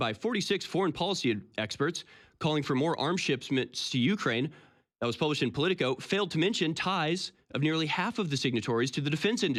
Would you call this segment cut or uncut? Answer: uncut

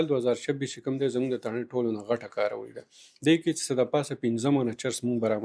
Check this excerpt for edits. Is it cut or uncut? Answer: uncut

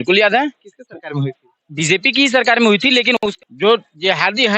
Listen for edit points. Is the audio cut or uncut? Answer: cut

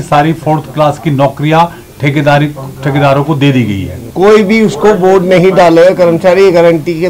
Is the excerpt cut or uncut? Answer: cut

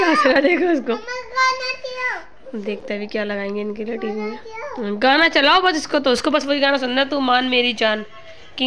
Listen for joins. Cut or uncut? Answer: uncut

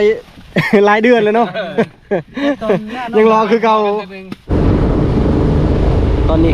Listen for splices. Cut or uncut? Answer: cut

